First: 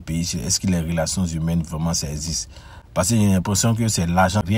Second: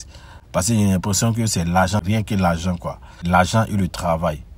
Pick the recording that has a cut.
second; 1 cut; at 3.2 s

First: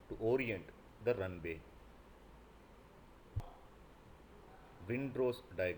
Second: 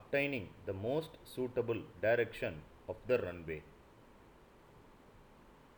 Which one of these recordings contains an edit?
first; 1 cut; at 3.4 s

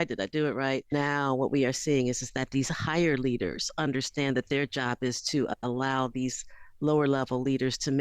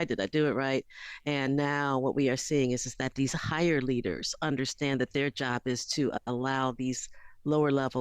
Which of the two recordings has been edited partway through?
first; 1 cut; at 0.9 s

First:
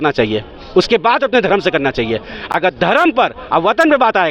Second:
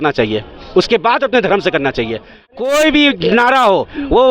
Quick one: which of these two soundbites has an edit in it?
second; 1 cut; at 2.5 s

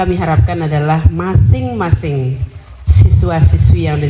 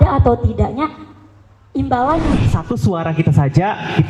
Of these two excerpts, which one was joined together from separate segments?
second; 1 cut; at 2.4 s

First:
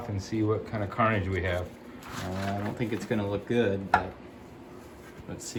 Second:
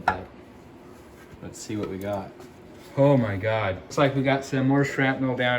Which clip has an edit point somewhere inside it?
second; 1 cut; at 3.8 s

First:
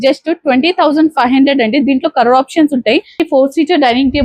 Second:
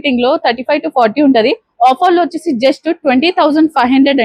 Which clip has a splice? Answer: first; 1 cut; at 3.2 s

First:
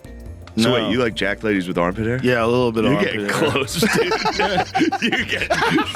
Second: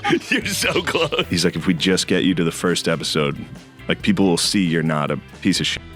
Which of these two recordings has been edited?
second; 1 cut; at 1.3 s

